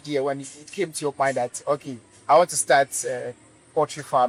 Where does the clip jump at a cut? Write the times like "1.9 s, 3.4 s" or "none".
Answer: none